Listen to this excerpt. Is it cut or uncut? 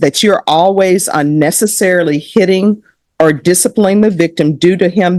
uncut